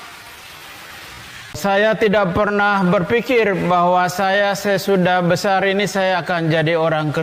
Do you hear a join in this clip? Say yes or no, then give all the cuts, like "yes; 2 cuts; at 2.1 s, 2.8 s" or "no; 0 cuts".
no; 0 cuts